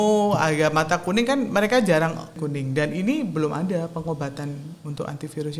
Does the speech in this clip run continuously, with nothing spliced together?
no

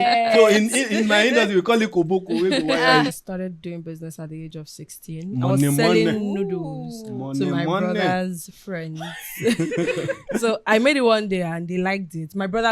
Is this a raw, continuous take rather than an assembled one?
no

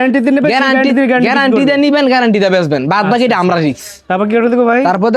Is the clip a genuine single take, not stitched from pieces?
yes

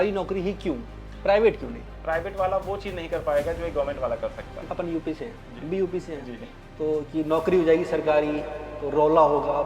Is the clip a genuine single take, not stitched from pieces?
no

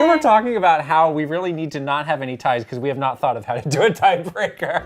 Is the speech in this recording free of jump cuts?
yes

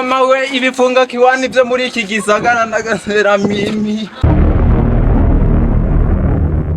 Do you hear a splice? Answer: yes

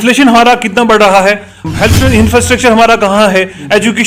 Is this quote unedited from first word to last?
no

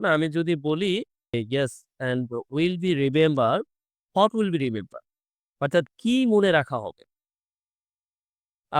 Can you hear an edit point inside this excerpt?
yes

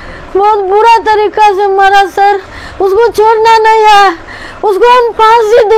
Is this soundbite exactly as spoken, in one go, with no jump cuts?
yes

